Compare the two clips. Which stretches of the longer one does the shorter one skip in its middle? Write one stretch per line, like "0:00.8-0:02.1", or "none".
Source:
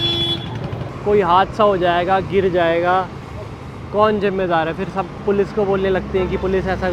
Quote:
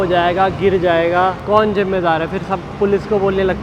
0:03.1-0:03.9